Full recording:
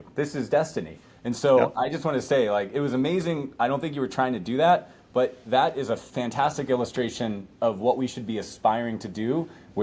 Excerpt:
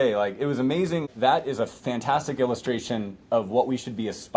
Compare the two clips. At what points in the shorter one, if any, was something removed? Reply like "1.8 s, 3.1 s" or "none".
1.1 s